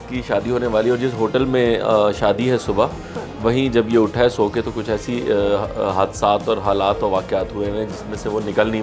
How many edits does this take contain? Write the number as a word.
zero